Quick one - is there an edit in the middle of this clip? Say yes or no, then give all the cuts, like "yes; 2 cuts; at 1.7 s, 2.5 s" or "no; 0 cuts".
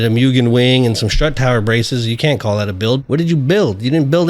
yes; 1 cut; at 3.0 s